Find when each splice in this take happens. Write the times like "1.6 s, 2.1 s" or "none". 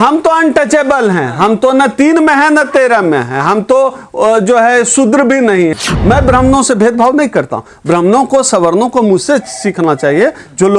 5.9 s